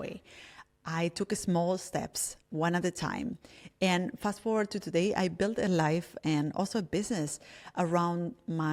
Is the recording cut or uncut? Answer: uncut